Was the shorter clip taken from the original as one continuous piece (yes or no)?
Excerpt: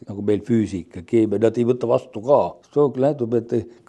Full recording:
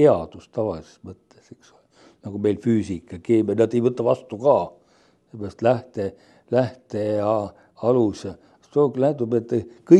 no